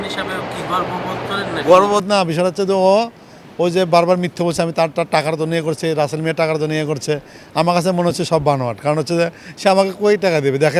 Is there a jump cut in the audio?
no; 0 cuts

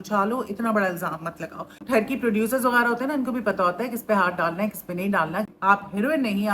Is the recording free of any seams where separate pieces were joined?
no; 2 cuts; at 1.8 s, 5.5 s

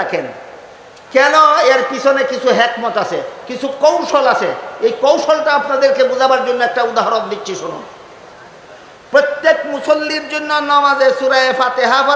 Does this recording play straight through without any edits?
yes; 0 cuts

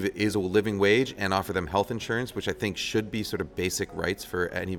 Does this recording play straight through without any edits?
yes; 0 cuts

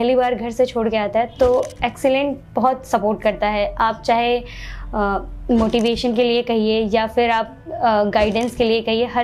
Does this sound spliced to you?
no; 0 cuts

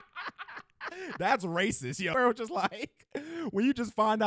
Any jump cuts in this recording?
yes; 1 cut; at 2.1 s

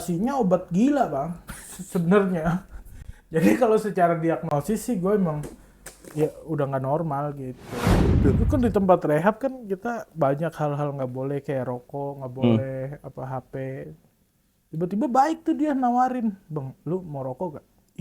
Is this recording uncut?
no; 1 cut; at 8.1 s

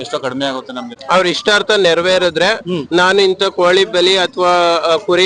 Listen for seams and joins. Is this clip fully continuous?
no; 1 cut; at 0.9 s

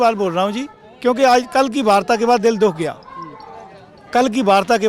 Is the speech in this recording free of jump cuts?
yes; 0 cuts

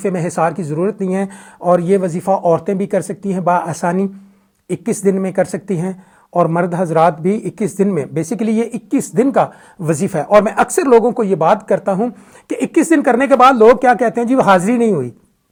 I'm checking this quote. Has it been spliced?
no; 0 cuts

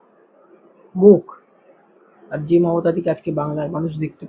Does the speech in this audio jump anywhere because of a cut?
no; 0 cuts

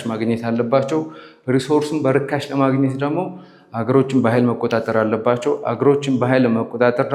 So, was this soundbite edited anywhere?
no; 0 cuts

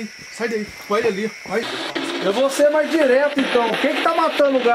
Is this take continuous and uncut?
no; 1 cut; at 1.7 s

